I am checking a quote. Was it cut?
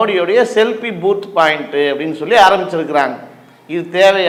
no; 0 cuts

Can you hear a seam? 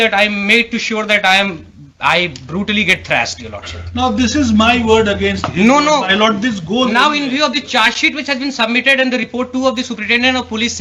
no; 0 cuts

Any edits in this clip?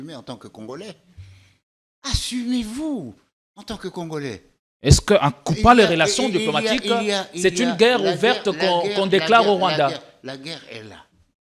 no; 0 cuts

